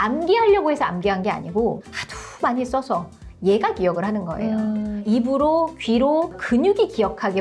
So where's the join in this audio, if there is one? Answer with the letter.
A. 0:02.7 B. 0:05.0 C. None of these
B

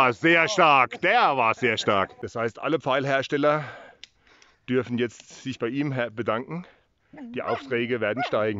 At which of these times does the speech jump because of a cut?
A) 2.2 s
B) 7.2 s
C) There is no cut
A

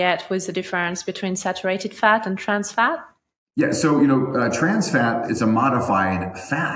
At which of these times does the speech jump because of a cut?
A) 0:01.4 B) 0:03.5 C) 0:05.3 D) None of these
C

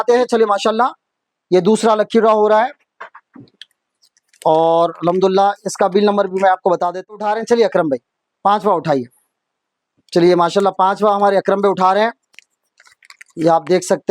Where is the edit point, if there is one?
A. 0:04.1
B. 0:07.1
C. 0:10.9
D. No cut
B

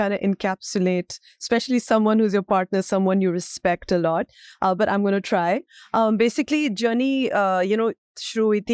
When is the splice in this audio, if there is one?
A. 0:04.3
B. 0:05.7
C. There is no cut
C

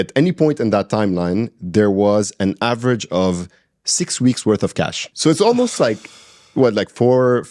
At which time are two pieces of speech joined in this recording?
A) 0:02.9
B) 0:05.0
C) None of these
B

